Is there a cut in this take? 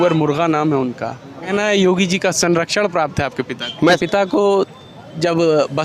yes; 2 cuts; at 1.5 s, 4.0 s

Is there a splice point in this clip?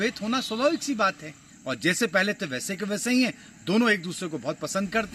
no; 0 cuts

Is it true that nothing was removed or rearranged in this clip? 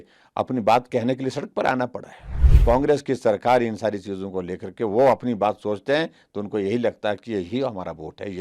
no; 1 cut; at 2.5 s

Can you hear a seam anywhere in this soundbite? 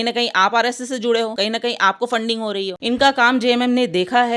yes; 2 cuts; at 1.3 s, 2.8 s

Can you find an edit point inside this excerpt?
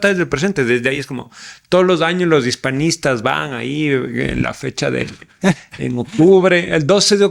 no; 0 cuts

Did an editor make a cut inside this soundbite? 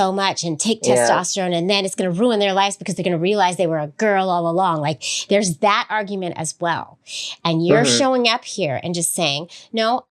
no; 0 cuts

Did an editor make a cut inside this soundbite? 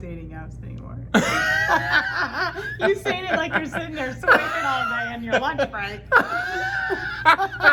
no; 0 cuts

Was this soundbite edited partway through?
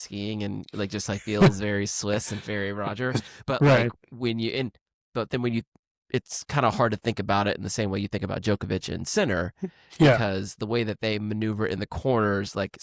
no; 0 cuts

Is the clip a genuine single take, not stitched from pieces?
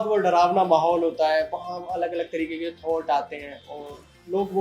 yes; 0 cuts

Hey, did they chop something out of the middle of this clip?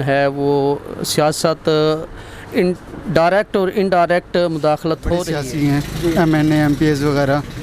yes; 1 cut; at 5.3 s

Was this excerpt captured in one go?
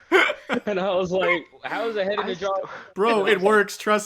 no; 1 cut; at 2.8 s

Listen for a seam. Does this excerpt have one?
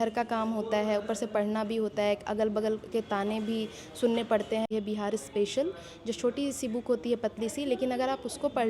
yes; 1 cut; at 4.7 s

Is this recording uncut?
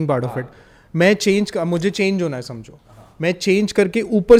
yes; 0 cuts

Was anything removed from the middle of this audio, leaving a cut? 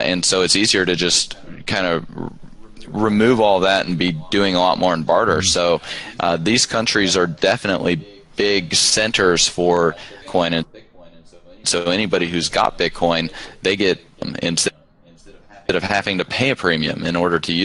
no; 0 cuts

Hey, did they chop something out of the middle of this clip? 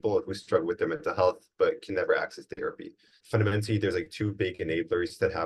yes; 1 cut; at 3.2 s

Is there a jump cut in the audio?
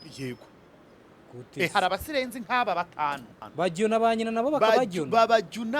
yes; 1 cut; at 3.4 s

